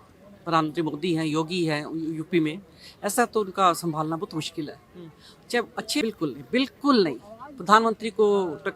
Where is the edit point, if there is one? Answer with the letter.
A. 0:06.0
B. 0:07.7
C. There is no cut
A